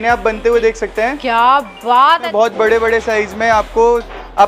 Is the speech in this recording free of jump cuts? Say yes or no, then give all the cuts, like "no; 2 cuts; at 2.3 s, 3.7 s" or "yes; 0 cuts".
no; 1 cut; at 2.3 s